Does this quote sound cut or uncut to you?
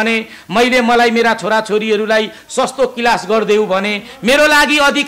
uncut